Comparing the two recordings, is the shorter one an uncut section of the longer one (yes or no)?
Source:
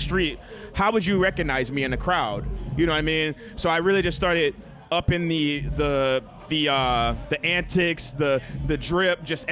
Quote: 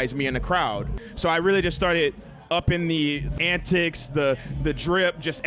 no